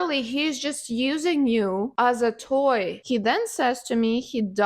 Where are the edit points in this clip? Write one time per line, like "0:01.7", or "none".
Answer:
0:03.0